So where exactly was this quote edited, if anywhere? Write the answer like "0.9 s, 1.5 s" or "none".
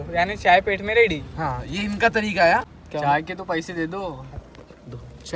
2.8 s